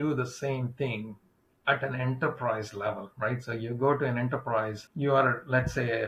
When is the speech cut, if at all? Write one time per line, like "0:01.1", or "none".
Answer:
0:04.8